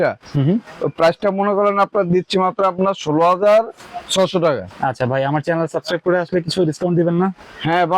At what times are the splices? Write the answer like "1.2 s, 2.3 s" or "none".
4.7 s